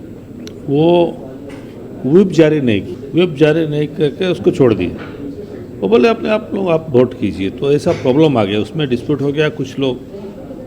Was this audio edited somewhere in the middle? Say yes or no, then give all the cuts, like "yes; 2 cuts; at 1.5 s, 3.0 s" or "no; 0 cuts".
yes; 1 cut; at 3.0 s